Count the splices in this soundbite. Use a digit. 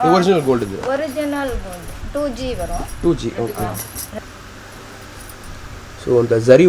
1